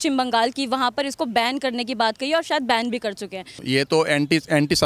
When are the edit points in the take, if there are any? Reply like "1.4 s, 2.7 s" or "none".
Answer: 3.6 s